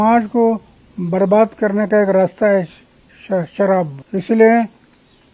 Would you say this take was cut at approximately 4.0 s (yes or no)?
yes